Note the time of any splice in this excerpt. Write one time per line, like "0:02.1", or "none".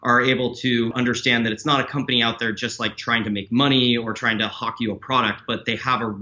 0:00.9